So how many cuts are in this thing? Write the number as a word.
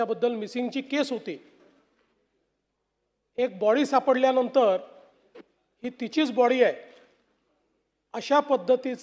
zero